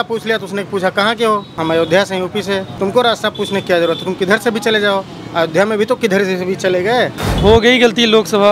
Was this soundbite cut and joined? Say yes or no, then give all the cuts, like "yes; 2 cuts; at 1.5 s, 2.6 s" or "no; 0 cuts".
yes; 3 cuts; at 1.5 s, 2.7 s, 7.2 s